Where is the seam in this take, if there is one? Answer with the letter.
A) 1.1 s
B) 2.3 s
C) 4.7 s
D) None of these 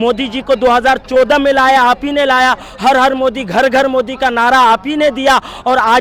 D